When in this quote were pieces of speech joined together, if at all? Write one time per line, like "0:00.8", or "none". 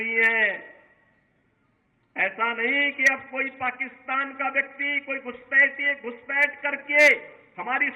none